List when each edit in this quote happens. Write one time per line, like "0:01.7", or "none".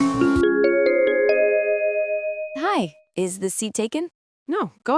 0:02.6

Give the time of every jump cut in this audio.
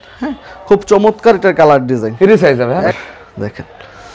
0:02.9

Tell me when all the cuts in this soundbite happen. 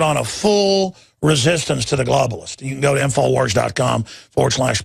0:02.0

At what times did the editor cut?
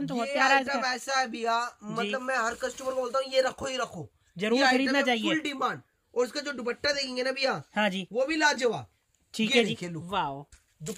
none

